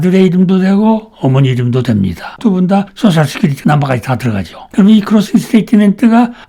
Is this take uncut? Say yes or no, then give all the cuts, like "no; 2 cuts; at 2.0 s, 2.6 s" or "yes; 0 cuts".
yes; 0 cuts